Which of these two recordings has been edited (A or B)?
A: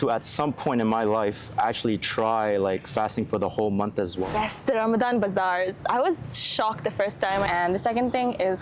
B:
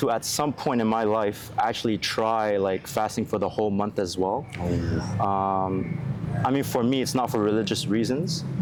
A